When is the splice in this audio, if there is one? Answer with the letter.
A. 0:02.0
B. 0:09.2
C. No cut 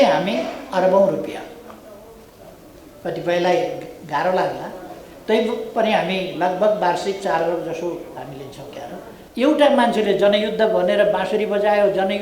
B